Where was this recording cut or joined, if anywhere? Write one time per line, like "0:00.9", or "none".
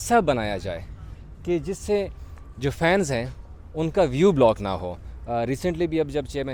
none